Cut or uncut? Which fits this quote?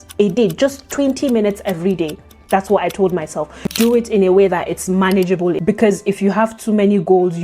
cut